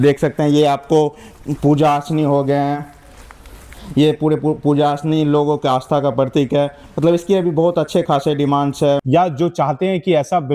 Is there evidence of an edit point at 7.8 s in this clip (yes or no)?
no